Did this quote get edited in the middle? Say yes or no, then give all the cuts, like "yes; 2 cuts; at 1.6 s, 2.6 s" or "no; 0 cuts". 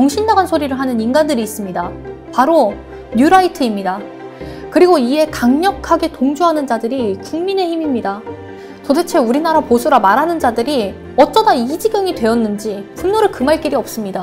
yes; 1 cut; at 12.9 s